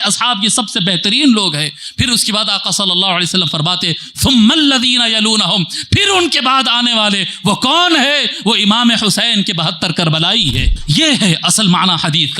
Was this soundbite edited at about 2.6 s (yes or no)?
no